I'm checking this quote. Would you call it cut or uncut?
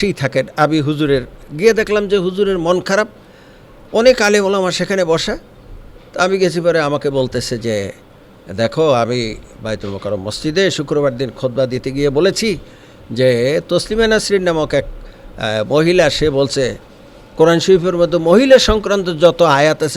cut